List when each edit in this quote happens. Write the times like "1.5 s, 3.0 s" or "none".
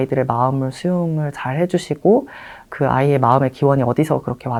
none